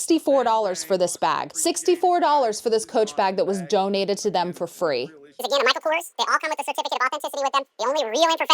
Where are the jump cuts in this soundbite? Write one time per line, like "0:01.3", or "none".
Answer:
0:01.5
0:05.4

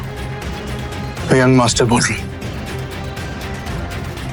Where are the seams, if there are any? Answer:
none

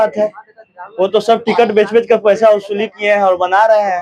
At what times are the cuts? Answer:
none

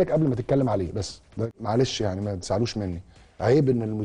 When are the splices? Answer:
0:01.4

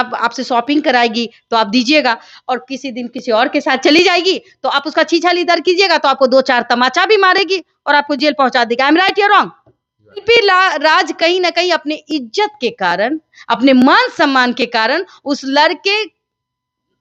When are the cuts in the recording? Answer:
none

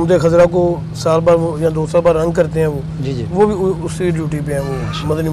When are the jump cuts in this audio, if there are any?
none

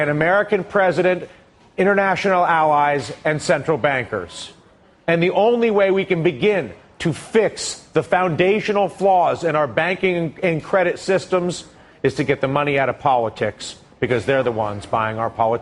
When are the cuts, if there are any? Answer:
none

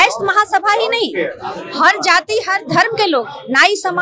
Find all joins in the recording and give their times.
none

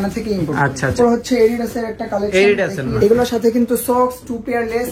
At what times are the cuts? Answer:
0:00.9
0:02.8

